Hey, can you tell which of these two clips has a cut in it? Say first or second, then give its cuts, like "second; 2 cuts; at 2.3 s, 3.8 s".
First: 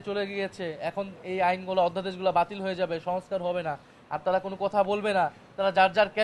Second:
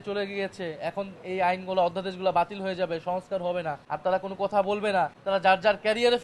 second; 2 cuts; at 3.8 s, 5.2 s